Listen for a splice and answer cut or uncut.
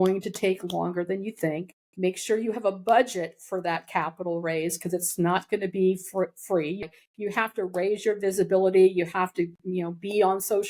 cut